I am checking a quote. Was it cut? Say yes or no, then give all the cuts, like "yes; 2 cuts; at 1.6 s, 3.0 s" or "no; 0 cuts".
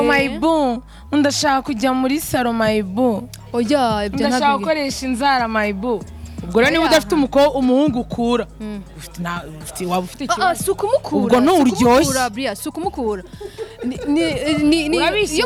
no; 0 cuts